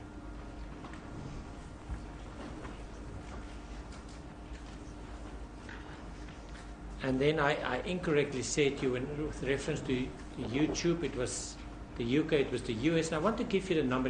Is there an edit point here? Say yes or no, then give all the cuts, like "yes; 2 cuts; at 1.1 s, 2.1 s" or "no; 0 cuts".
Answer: yes; 1 cut; at 6.1 s